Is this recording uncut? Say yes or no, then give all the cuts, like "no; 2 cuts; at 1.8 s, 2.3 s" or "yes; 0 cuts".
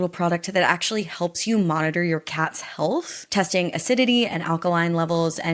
yes; 0 cuts